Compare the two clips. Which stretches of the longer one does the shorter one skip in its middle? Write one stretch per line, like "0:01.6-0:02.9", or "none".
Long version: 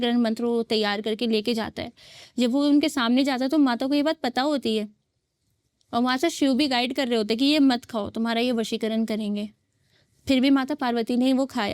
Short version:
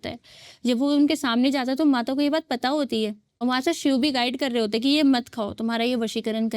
0:05.0-0:05.9